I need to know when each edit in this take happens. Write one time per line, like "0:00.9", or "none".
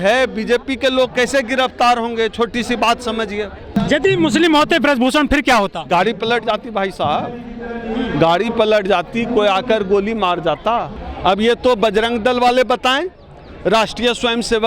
0:03.8
0:11.0

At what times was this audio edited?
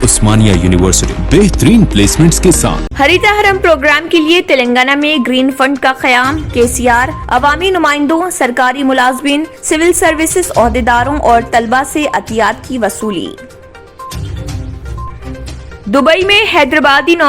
0:02.8

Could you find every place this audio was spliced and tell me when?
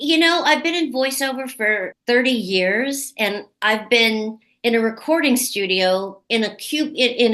0:01.9

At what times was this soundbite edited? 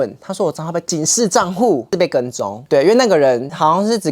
0:00.8
0:01.9

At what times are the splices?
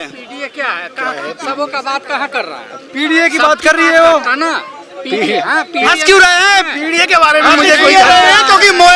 none

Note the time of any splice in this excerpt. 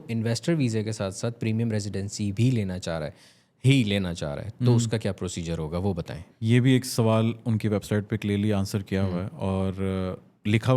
0:06.2

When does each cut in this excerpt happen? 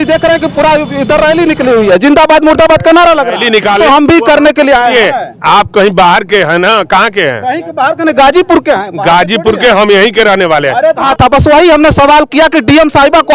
0:03.8
0:11.0

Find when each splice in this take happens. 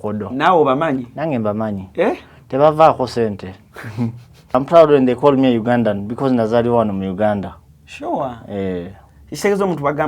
0:04.5

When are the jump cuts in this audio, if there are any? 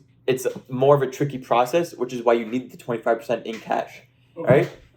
none

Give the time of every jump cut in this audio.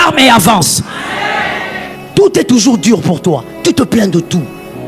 0:01.9

